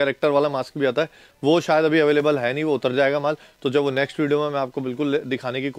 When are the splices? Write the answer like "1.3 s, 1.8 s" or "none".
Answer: none